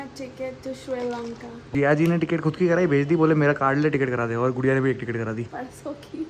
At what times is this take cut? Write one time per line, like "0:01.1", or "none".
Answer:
0:01.7
0:05.4